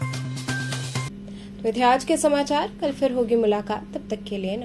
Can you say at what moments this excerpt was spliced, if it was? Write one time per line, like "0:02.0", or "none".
none